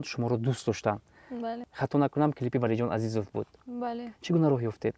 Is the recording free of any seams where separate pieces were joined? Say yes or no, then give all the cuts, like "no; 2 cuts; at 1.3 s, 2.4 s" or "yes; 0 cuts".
yes; 0 cuts